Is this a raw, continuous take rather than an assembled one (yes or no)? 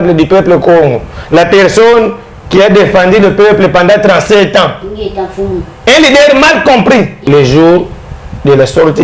no